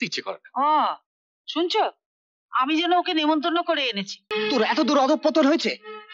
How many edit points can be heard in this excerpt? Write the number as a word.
one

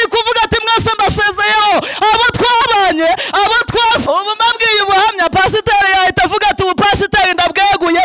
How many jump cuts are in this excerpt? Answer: one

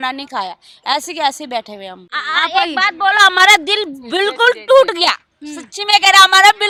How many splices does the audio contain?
zero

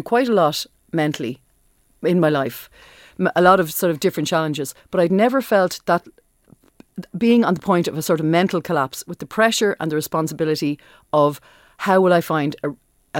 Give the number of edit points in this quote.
zero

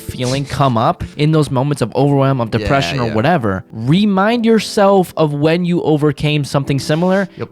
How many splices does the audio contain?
two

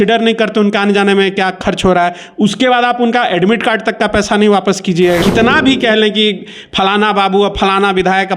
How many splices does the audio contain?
one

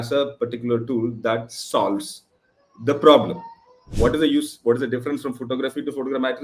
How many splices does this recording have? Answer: one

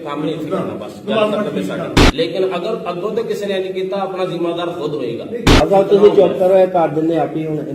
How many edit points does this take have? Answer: two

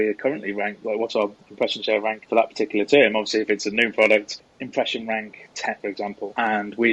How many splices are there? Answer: one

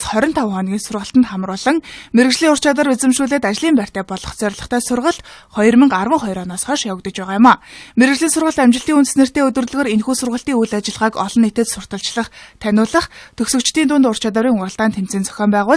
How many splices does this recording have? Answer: one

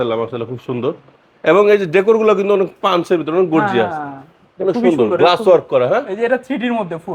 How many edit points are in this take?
zero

